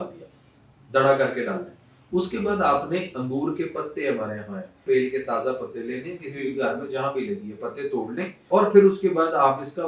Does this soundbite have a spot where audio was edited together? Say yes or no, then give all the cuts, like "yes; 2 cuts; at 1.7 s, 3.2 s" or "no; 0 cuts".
yes; 2 cuts; at 4.8 s, 8.4 s